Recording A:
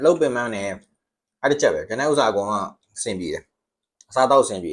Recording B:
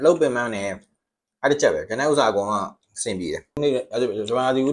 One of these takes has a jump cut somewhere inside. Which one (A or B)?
B